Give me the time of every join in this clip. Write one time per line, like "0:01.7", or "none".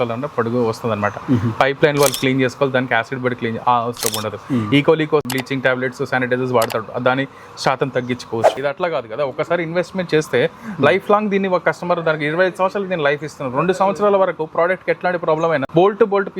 0:05.2
0:08.6